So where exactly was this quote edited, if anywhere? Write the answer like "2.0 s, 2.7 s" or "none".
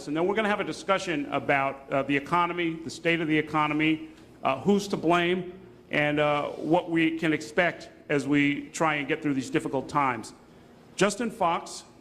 6.2 s